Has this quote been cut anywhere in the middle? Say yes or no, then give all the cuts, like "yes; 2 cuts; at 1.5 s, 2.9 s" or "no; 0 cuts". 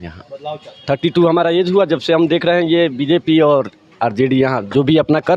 no; 0 cuts